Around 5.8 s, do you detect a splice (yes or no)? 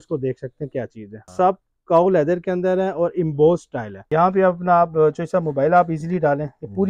no